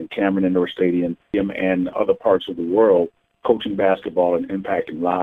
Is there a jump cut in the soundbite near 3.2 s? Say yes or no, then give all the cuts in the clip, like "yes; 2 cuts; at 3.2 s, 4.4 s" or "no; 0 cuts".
no; 1 cut; at 1.5 s